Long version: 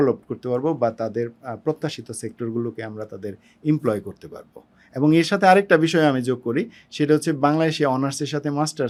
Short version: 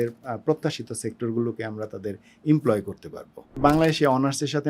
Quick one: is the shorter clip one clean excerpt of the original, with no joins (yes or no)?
no